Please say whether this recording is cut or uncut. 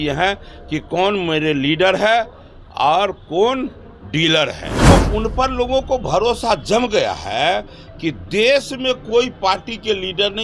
cut